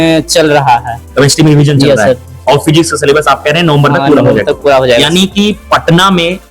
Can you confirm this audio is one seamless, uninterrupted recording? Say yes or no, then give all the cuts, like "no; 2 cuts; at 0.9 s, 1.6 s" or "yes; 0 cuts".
yes; 0 cuts